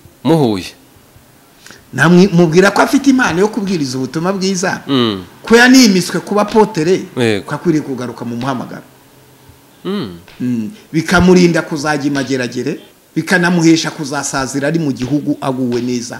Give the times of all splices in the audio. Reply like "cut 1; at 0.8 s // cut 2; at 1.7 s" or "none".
cut 1; at 12.9 s